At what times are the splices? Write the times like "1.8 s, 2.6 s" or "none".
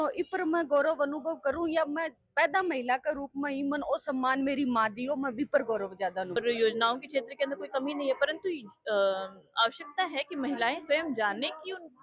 6.4 s